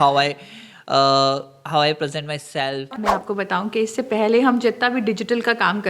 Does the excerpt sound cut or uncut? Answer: cut